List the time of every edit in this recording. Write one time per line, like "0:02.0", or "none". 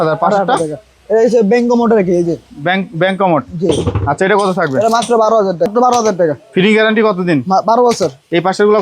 0:05.7